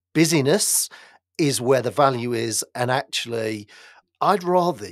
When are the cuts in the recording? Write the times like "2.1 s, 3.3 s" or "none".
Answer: 3.9 s